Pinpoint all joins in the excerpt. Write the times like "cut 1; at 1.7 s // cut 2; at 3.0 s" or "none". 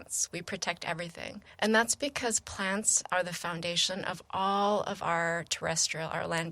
cut 1; at 1.4 s

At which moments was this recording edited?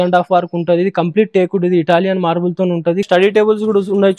cut 1; at 3.0 s

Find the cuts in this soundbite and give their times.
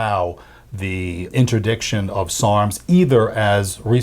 cut 1; at 1.3 s

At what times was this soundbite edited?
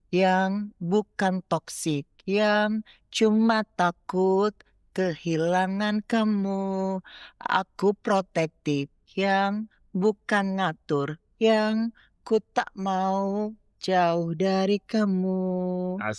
none

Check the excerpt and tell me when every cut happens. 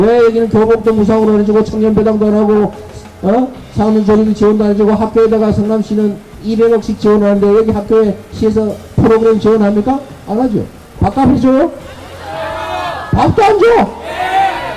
cut 1; at 11.0 s

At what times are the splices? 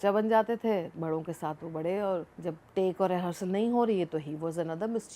cut 1; at 2.3 s

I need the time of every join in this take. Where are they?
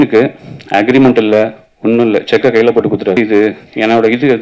cut 1; at 3.2 s

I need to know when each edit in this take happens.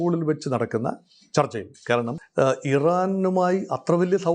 cut 1; at 2.2 s

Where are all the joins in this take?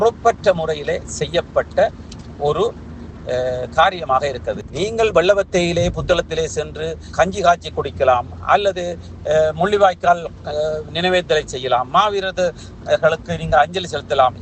cut 1; at 4.6 s

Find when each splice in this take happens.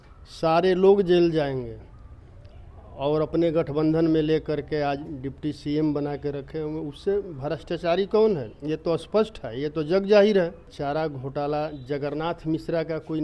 cut 1; at 10.7 s

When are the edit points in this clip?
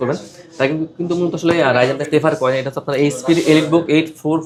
none

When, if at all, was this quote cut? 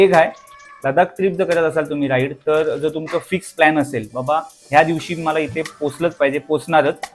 none

